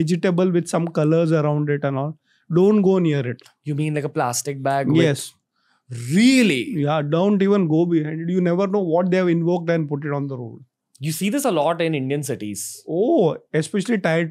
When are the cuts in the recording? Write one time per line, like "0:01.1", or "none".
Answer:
none